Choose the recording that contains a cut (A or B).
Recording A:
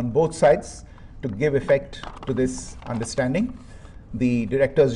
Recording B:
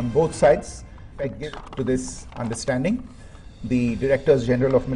B